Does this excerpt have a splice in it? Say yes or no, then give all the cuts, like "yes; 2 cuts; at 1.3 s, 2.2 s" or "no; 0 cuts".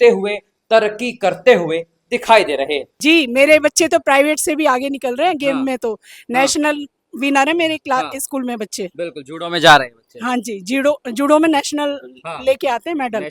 yes; 1 cut; at 2.9 s